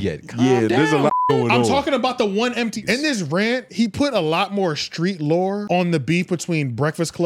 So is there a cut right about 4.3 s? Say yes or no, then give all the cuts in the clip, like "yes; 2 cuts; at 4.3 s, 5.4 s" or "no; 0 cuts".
no; 2 cuts; at 2.8 s, 5.6 s